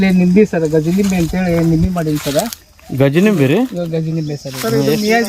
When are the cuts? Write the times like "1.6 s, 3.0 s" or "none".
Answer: 4.3 s